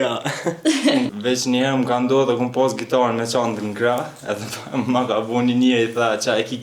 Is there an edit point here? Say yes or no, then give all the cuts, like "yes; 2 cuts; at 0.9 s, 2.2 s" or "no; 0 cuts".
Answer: yes; 1 cut; at 1.1 s